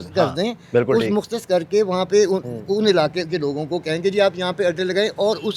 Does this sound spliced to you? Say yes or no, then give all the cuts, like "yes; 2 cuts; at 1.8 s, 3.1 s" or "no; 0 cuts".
no; 0 cuts